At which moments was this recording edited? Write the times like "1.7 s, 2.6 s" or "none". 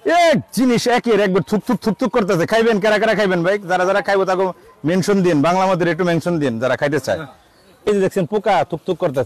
7.9 s